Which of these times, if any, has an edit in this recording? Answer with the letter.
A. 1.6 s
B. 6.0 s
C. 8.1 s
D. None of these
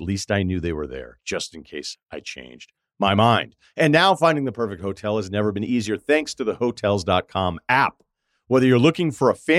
D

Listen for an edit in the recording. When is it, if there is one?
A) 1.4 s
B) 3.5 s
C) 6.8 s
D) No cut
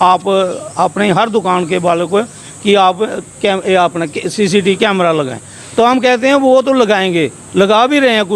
D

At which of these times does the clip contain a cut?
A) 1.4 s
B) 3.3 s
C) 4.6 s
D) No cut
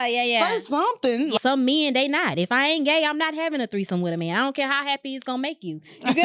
A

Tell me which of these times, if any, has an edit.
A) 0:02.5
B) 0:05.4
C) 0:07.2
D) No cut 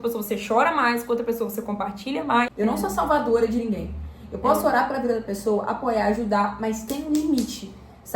A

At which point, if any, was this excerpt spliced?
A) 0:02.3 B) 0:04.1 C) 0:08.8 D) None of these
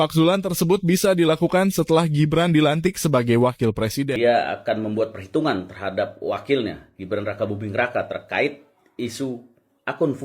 B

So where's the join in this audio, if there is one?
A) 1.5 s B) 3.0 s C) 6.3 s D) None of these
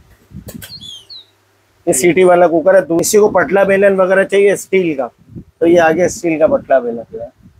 B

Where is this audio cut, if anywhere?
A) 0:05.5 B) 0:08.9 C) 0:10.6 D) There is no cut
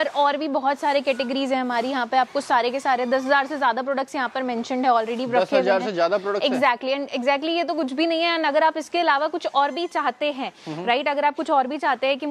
D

